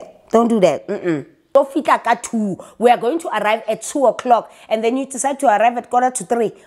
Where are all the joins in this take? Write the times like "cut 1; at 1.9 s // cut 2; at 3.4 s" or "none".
cut 1; at 1.5 s

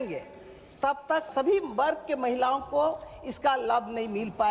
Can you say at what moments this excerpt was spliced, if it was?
cut 1; at 1.3 s

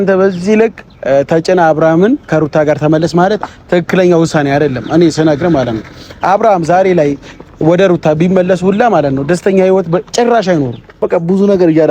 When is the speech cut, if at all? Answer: cut 1; at 11.0 s

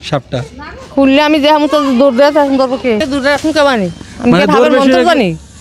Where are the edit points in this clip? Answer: cut 1; at 3.0 s

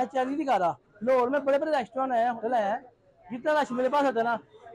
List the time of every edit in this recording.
cut 1; at 0.9 s // cut 2; at 2.6 s

